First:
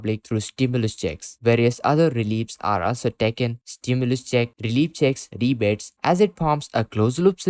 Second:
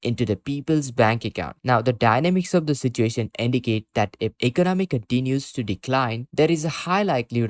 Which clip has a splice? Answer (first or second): second